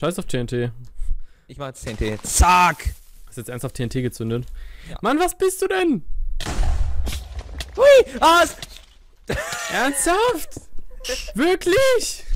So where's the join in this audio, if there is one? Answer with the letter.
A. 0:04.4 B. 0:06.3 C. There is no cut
C